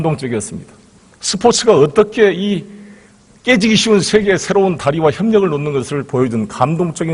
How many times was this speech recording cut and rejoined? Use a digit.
0